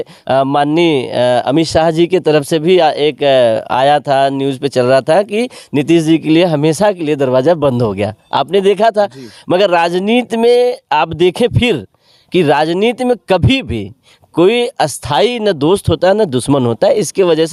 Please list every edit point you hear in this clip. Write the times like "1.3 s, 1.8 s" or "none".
none